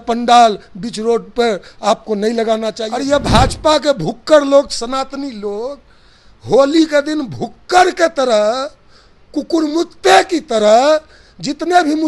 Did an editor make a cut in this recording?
yes; 1 cut; at 2.8 s

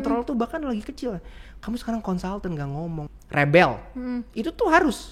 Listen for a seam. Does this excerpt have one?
yes; 1 cut; at 3.1 s

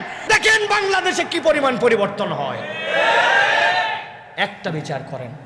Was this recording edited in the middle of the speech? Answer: no; 0 cuts

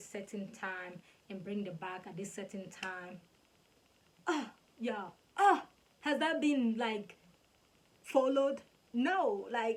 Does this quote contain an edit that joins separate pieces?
no; 0 cuts

